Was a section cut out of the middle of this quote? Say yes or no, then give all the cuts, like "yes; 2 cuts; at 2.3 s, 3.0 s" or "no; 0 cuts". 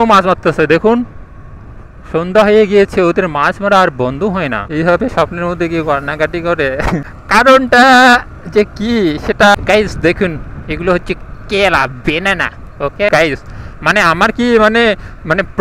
yes; 4 cuts; at 4.6 s, 7.1 s, 9.5 s, 13.1 s